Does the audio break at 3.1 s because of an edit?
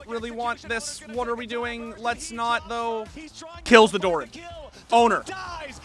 yes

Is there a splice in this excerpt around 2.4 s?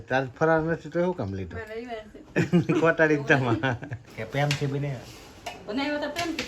no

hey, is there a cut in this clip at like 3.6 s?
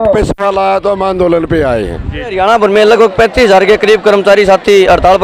no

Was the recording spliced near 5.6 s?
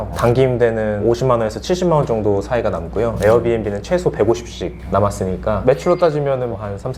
yes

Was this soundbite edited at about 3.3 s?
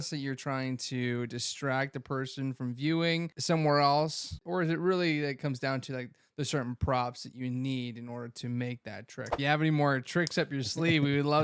yes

